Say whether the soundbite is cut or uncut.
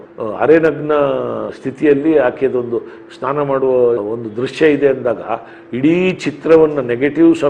uncut